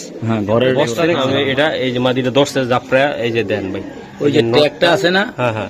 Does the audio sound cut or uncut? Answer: cut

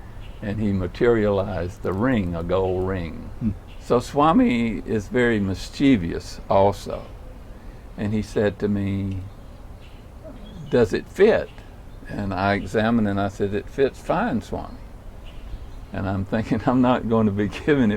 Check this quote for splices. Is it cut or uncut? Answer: cut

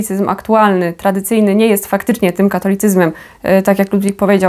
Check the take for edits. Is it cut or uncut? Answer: uncut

